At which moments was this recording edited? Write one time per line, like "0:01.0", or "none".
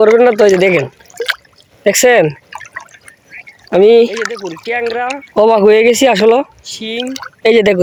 none